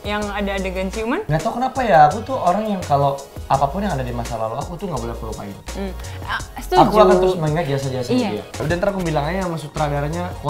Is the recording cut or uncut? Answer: cut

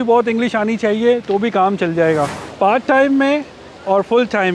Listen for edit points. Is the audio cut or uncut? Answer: cut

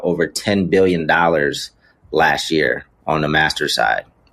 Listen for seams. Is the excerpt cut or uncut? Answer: uncut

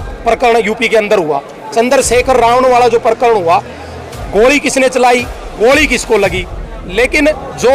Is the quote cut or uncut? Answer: uncut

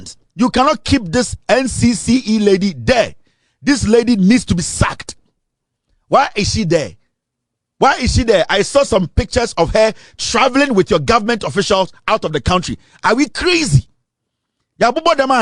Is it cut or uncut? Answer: uncut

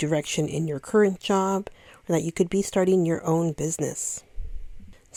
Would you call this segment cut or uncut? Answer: uncut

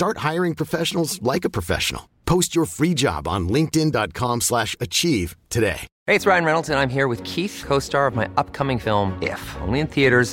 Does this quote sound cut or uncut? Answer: cut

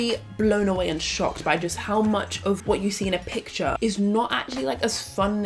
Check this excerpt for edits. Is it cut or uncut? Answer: cut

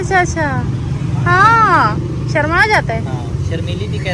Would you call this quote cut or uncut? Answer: uncut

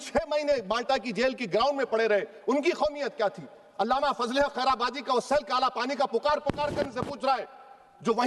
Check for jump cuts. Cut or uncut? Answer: uncut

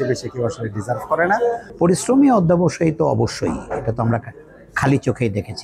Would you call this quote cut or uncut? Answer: cut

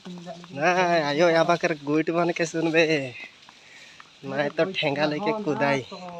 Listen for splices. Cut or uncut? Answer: uncut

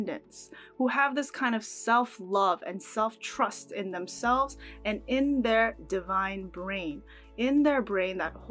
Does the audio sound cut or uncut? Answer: uncut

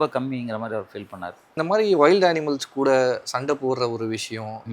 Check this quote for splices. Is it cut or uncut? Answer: cut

